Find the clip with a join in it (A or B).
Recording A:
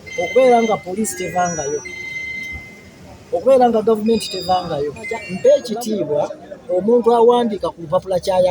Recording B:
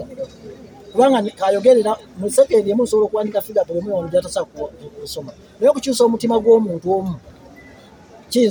A